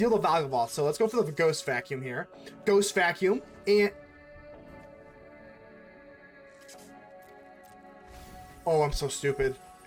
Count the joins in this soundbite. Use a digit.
0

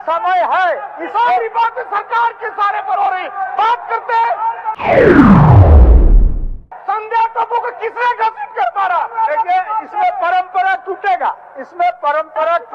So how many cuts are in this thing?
3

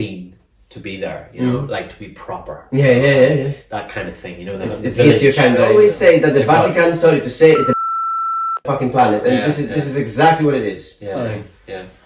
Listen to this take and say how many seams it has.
1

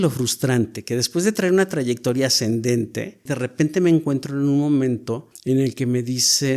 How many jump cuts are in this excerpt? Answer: 2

